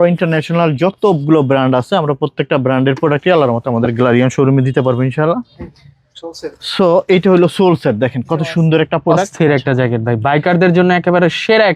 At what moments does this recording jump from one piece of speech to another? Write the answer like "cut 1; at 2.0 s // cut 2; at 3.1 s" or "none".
none